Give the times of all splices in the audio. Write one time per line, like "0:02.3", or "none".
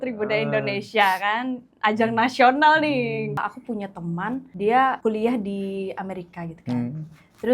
0:03.4
0:04.5
0:05.0